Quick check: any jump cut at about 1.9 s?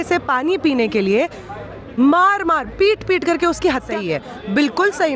no; 1 cut; at 3.9 s

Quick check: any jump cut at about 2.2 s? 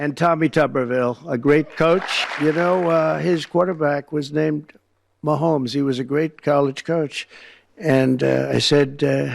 yes; 1 cut; at 2.2 s

